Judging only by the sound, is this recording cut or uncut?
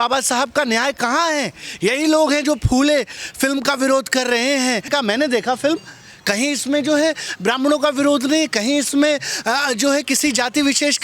cut